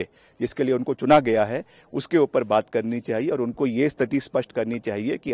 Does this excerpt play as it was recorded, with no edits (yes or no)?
yes